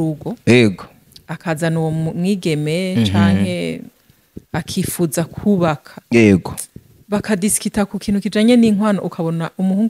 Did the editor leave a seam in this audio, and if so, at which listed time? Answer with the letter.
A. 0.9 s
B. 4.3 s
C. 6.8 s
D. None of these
D